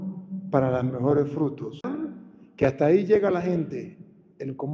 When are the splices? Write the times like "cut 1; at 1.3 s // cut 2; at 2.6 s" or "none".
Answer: cut 1; at 1.9 s